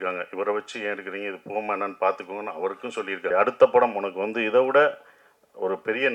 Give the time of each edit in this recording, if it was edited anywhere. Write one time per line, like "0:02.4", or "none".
0:03.3